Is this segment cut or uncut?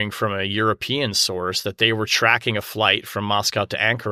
uncut